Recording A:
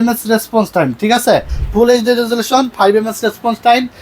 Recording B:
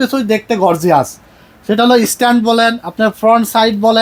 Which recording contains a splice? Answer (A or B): A